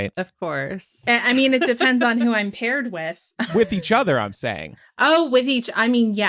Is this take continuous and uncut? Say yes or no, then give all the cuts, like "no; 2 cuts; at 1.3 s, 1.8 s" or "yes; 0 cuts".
no; 2 cuts; at 1.0 s, 3.5 s